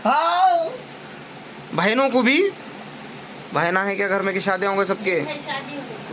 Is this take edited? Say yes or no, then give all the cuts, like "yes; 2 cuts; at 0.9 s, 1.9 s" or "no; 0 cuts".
no; 0 cuts